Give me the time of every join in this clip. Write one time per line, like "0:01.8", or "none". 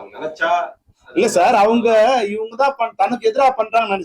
none